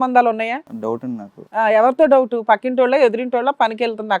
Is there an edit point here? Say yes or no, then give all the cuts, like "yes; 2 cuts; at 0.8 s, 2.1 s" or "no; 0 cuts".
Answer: yes; 1 cut; at 1.1 s